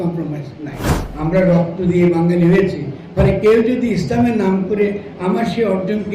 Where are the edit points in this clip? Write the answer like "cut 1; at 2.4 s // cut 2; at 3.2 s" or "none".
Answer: cut 1; at 1.0 s